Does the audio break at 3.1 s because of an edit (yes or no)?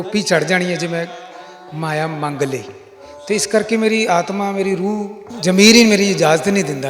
no